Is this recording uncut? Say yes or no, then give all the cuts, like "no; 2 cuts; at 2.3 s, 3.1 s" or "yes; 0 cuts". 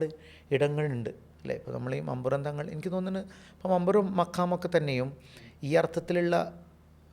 no; 1 cut; at 1.3 s